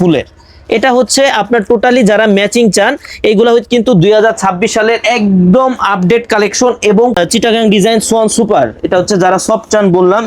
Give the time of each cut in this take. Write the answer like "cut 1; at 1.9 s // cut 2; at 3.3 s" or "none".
cut 1; at 7.2 s